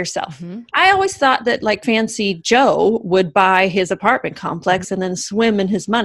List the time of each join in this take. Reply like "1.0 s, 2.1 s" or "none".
1.8 s